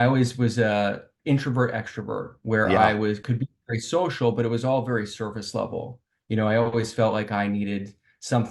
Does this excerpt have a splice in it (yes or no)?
yes